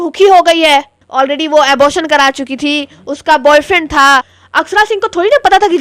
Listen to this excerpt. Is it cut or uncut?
cut